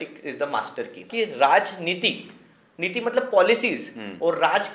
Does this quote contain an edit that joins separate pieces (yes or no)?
yes